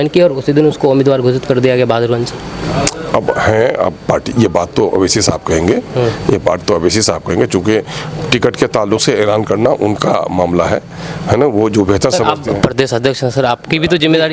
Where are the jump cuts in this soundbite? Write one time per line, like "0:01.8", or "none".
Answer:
none